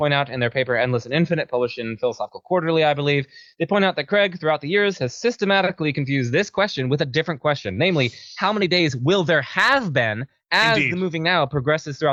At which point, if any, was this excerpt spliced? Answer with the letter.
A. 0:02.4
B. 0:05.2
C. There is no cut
C